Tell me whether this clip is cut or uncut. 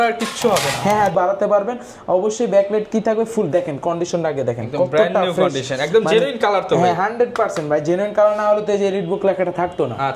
cut